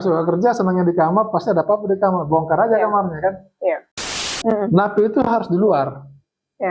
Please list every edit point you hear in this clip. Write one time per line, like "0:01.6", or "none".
0:04.1